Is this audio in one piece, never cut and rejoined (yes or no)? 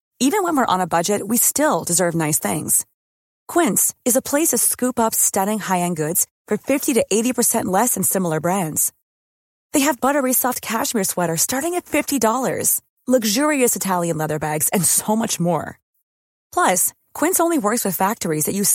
yes